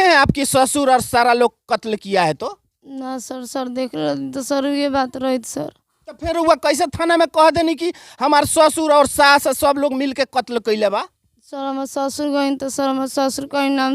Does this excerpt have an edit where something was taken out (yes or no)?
no